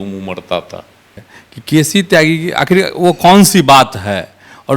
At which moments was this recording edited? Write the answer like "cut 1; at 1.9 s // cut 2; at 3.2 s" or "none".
cut 1; at 1.1 s